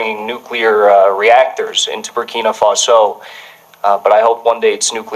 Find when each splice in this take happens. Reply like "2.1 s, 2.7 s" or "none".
none